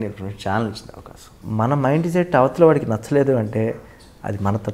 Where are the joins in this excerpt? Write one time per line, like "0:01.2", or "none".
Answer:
0:01.4